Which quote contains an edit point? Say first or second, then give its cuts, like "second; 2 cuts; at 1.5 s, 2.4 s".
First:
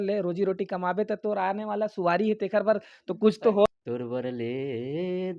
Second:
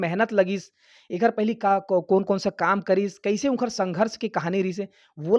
first; 1 cut; at 3.7 s